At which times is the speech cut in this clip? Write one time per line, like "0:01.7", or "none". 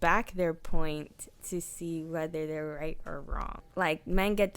0:03.6